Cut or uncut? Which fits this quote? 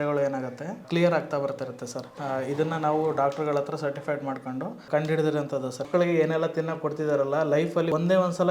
cut